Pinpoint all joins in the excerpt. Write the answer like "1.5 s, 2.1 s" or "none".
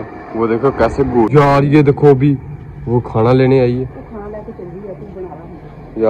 1.3 s